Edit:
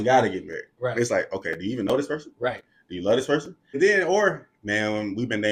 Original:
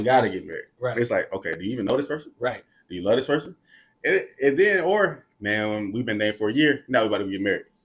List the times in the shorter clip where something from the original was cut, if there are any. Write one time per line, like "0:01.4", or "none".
0:03.8